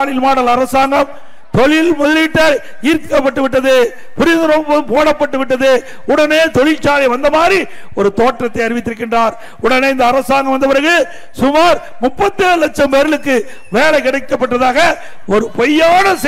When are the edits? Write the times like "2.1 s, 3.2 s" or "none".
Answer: none